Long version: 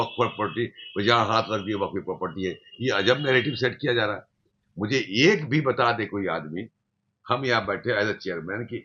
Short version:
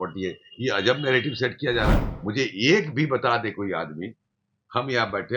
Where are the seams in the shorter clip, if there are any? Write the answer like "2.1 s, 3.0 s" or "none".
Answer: 2.1 s